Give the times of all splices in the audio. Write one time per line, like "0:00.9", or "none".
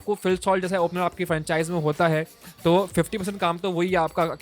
none